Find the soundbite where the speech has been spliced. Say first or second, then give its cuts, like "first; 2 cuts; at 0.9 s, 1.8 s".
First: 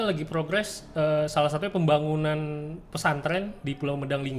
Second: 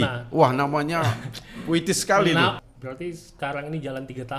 second; 1 cut; at 2.6 s